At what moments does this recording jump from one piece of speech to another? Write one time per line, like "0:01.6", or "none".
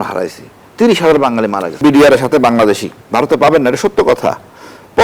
0:01.8
0:02.9